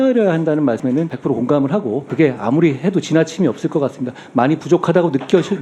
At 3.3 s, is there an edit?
no; 2 cuts; at 0.9 s, 2.0 s

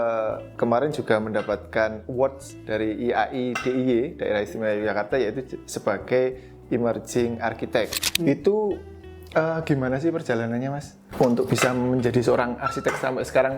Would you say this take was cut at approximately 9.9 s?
no; 1 cut; at 8.0 s

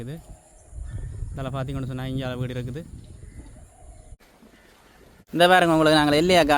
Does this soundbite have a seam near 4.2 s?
yes; 1 cut; at 4.2 s

